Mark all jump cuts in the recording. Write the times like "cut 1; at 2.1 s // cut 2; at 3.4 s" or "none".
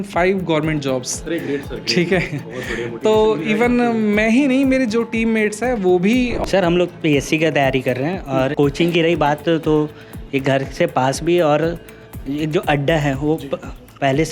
cut 1; at 6.4 s // cut 2; at 8.5 s

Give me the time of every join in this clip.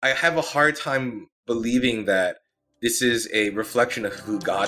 cut 1; at 1.4 s

